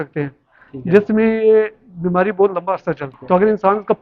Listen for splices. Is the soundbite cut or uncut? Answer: cut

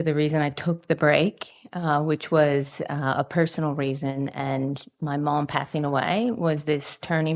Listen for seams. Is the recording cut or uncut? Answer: uncut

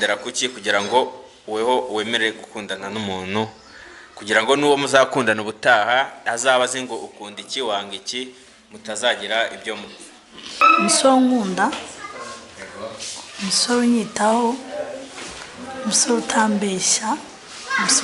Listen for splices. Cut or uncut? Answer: cut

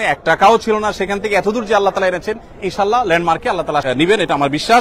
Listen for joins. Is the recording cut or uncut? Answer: cut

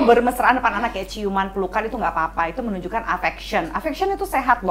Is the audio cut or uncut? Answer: uncut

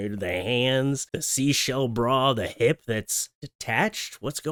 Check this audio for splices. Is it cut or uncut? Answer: uncut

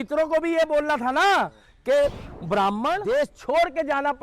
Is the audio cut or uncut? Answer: cut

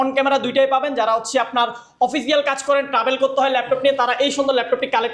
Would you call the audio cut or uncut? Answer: uncut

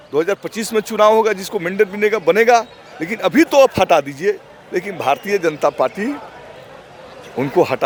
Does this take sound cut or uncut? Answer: uncut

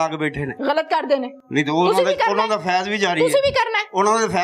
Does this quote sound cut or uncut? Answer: uncut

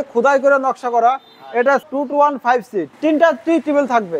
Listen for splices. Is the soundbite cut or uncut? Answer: uncut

